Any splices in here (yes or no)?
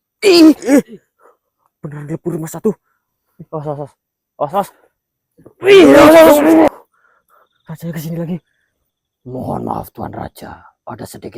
yes